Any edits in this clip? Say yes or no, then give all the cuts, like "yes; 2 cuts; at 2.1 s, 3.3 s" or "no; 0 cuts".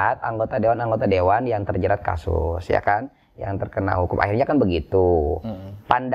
no; 0 cuts